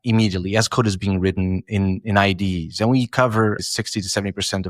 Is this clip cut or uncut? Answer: cut